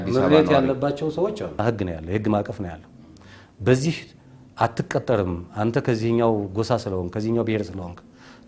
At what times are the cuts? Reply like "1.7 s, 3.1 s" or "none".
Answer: 1.6 s